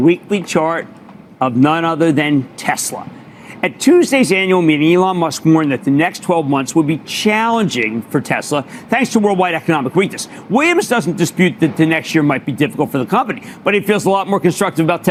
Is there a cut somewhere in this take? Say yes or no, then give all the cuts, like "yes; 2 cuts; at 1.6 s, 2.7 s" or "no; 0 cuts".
no; 0 cuts